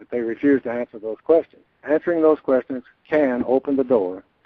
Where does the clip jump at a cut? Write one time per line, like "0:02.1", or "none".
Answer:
none

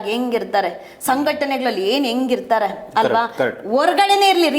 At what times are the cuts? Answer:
none

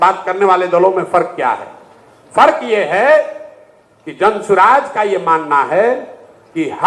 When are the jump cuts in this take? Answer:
none

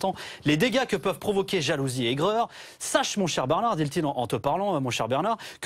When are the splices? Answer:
none

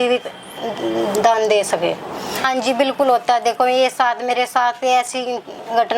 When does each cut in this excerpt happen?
0:02.3

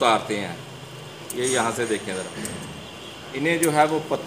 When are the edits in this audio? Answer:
none

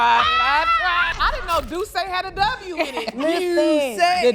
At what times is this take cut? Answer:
0:01.1

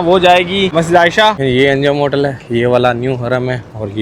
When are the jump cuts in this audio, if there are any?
0:01.1

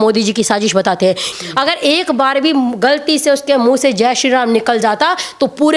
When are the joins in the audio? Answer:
0:01.3

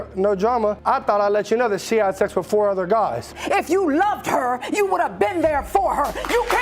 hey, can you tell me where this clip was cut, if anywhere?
0:00.8
0:03.3

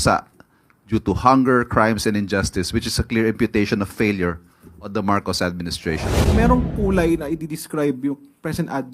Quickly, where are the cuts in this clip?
0:06.2

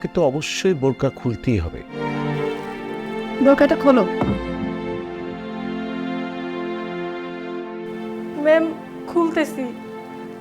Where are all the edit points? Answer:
0:02.0

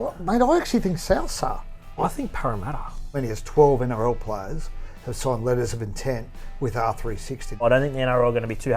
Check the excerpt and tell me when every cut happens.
0:01.9
0:02.9
0:07.6

